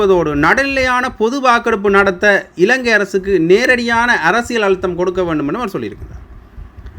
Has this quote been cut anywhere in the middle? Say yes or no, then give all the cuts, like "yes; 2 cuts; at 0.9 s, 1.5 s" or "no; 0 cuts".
no; 0 cuts